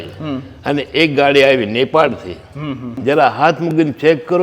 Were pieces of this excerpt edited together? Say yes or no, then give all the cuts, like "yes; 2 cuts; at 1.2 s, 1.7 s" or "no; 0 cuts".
yes; 1 cut; at 2.8 s